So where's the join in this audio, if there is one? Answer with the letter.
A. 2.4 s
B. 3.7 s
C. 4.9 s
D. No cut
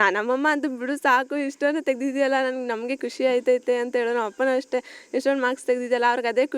D